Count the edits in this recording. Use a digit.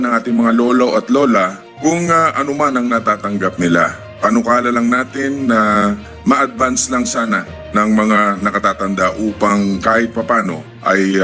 0